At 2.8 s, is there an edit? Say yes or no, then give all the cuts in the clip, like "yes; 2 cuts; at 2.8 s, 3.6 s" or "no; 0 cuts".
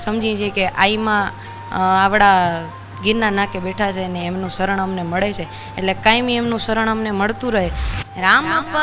no; 1 cut; at 7.9 s